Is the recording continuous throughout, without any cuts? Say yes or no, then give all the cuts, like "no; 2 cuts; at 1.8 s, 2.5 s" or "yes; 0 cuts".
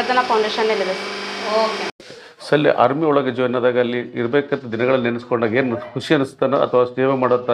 no; 1 cut; at 1.9 s